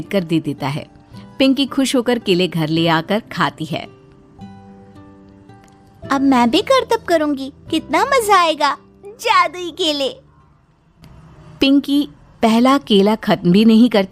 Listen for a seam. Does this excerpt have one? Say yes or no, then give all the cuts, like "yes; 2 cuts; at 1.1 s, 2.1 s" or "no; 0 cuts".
no; 0 cuts